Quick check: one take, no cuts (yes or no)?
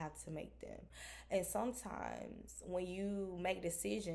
yes